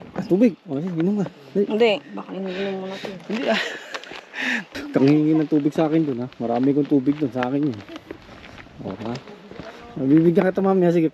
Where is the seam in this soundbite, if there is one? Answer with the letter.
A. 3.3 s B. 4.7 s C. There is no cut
B